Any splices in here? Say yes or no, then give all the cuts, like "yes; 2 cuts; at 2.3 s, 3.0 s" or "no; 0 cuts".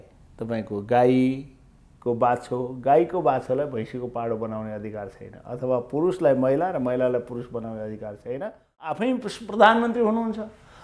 yes; 1 cut; at 9.0 s